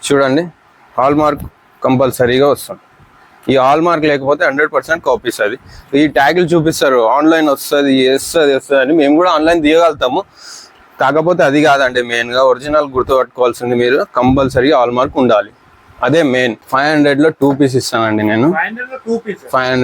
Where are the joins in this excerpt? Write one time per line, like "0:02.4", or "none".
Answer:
0:16.6